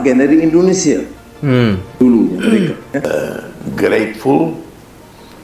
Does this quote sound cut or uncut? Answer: cut